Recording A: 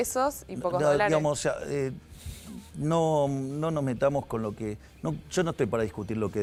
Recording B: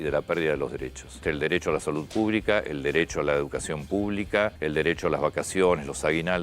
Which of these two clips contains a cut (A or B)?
B